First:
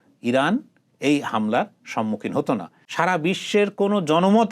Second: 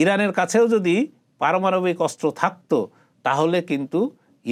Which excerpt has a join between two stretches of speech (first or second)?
first